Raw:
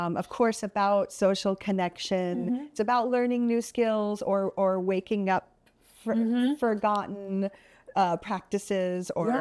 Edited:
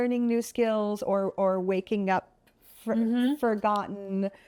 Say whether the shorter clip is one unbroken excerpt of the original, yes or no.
yes